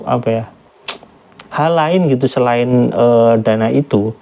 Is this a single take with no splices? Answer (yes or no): yes